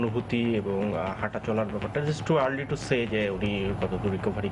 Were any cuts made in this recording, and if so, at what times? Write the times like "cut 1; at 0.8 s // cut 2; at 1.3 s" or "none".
none